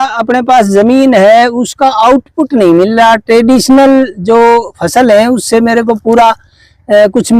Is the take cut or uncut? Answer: uncut